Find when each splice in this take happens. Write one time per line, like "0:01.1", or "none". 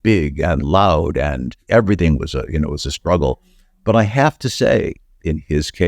0:01.6